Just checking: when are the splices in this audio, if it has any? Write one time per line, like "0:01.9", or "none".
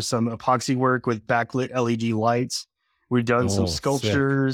none

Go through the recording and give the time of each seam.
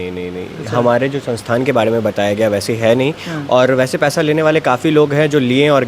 none

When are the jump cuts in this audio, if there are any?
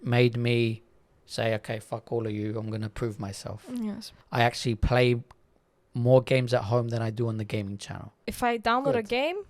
0:04.1
0:08.3

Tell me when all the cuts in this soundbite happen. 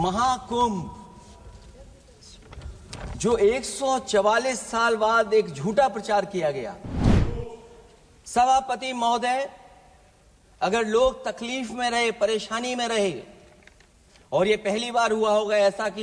0:07.2

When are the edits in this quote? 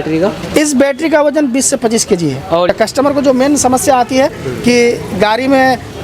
0:02.7

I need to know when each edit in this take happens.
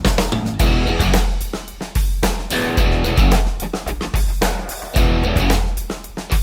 none

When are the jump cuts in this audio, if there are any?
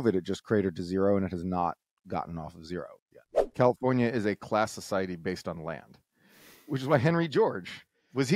0:03.6

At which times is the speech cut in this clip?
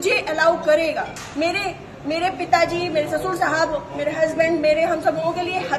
0:01.2

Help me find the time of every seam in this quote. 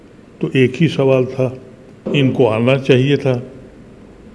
0:02.1

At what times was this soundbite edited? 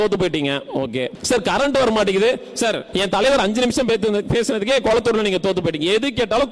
0:01.2
0:02.8

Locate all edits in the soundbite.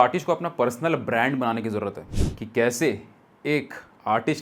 0:02.1

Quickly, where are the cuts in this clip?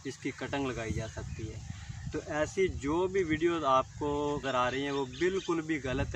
0:04.4

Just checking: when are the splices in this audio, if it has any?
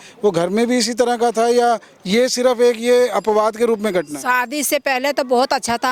none

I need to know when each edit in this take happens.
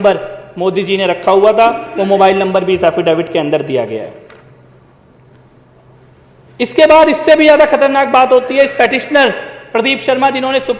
none

